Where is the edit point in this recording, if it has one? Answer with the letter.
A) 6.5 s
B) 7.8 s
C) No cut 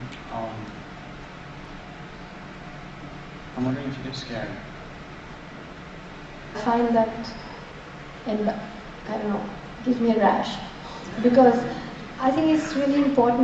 C